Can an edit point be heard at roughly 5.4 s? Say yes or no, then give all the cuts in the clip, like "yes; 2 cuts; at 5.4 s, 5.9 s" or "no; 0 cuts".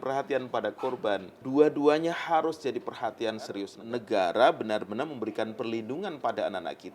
no; 2 cuts; at 1.4 s, 3.7 s